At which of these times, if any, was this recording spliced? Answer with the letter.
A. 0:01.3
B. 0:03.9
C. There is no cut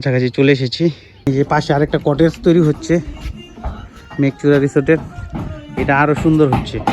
A